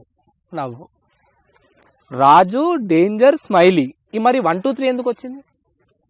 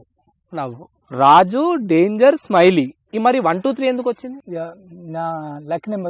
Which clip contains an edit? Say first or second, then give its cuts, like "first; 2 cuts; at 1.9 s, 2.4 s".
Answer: second; 2 cuts; at 0.9 s, 4.4 s